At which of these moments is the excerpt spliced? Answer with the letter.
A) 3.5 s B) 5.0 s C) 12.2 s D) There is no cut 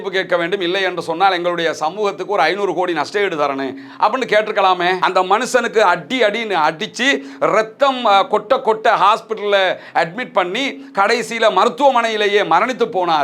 B